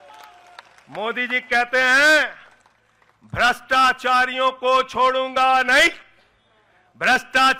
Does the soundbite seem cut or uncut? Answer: uncut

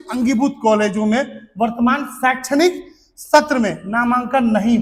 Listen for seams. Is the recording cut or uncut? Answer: uncut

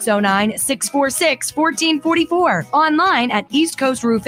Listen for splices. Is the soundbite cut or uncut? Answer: uncut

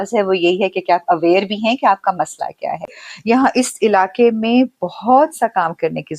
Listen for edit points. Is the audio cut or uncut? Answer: cut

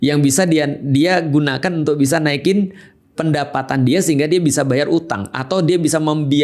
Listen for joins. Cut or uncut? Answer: uncut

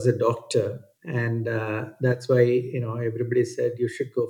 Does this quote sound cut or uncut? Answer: cut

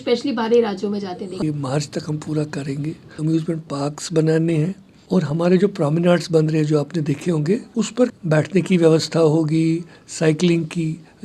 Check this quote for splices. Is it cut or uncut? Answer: cut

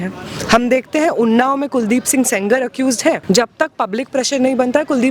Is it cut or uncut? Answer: cut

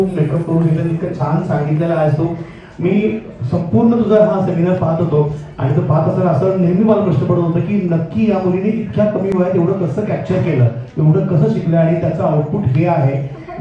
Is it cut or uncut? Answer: uncut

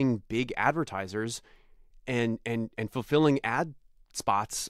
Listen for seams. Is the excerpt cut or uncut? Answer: uncut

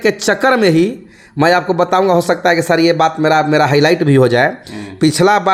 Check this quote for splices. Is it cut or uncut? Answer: uncut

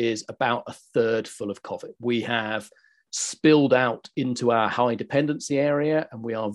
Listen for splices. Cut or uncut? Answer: uncut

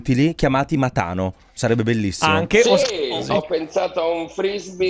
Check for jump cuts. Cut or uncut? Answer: cut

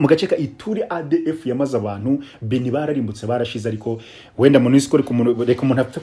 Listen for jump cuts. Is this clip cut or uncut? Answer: uncut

